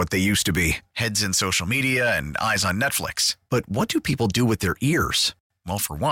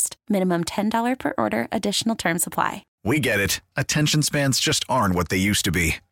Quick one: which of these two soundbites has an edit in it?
second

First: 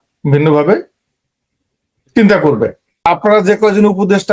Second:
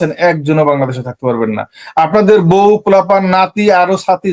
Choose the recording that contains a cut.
first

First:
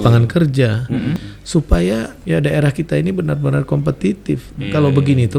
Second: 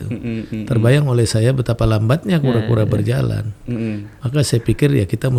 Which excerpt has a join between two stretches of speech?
first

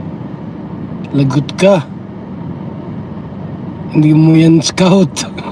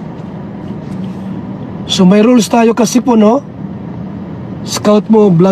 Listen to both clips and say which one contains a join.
second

